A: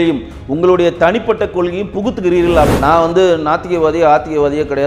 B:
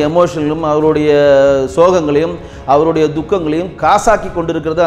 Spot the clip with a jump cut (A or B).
A